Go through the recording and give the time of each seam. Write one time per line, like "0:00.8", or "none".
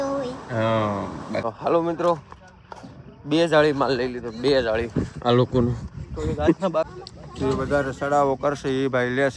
0:01.4
0:06.9